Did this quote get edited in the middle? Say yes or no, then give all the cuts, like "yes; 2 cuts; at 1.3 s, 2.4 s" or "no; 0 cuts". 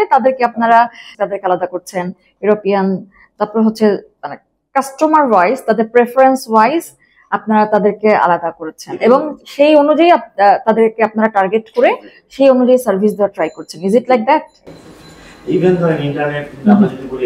yes; 1 cut; at 1.1 s